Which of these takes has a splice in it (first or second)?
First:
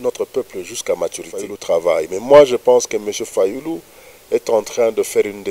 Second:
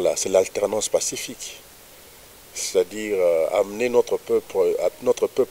first